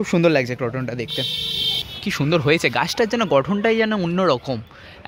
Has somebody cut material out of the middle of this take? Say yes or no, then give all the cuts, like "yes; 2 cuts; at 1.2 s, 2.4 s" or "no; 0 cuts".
yes; 1 cut; at 1.9 s